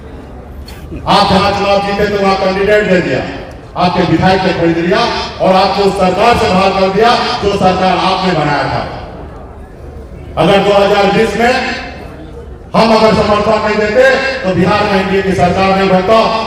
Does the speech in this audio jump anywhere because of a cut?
no; 0 cuts

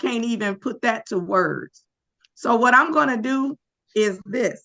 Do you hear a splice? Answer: no; 0 cuts

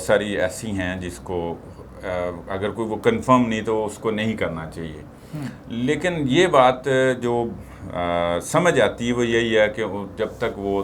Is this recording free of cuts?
yes; 0 cuts

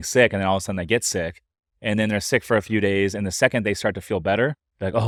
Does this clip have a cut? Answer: no; 0 cuts

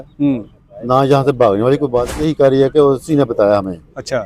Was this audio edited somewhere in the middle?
yes; 1 cut; at 2.3 s

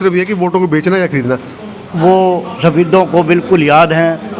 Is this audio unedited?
no; 1 cut; at 1.5 s

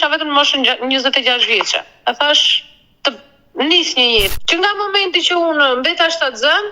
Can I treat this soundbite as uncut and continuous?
no; 1 cut; at 4.3 s

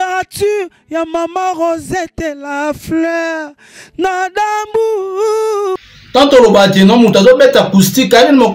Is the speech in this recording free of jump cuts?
no; 1 cut; at 5.8 s

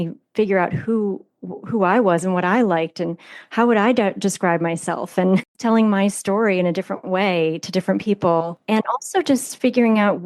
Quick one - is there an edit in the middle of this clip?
yes; 2 cuts; at 5.5 s, 8.6 s

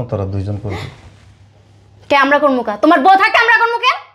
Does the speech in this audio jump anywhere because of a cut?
no; 0 cuts

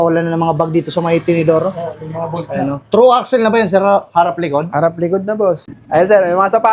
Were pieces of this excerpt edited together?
yes; 1 cut; at 5.7 s

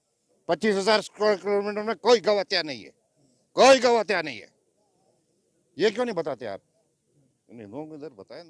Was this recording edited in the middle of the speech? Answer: no; 0 cuts

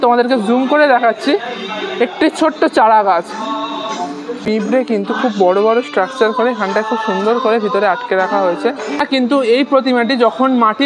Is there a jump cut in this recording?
yes; 2 cuts; at 4.4 s, 9.0 s

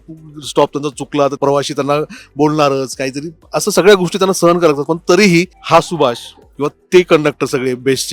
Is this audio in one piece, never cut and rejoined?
no; 2 cuts; at 1.4 s, 5.6 s

